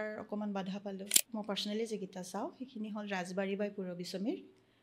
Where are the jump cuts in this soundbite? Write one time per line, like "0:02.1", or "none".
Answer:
0:01.2